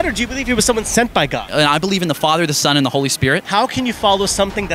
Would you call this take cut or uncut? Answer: cut